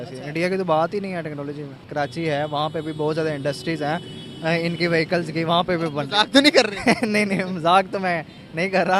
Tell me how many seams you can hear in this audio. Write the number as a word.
one